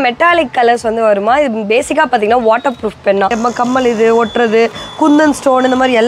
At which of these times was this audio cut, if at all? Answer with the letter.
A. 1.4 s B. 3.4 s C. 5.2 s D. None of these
B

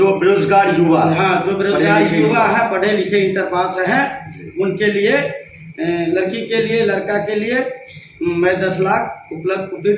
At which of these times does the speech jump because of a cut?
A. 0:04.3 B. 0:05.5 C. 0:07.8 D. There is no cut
D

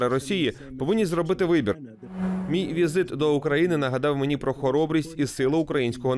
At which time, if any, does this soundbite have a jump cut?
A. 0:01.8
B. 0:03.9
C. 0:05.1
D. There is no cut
A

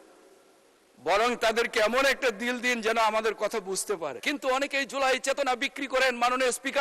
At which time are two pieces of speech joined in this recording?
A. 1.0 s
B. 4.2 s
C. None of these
B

